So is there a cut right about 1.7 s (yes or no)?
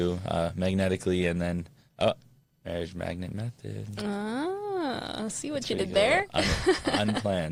no